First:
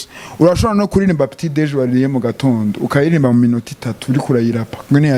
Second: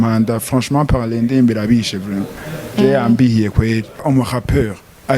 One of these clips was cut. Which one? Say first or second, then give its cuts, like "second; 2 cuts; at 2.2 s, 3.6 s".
second; 1 cut; at 4.0 s